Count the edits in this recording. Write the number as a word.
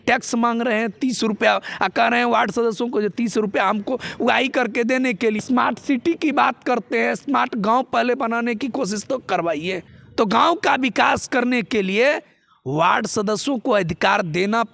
two